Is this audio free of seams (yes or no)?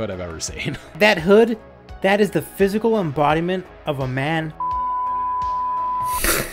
no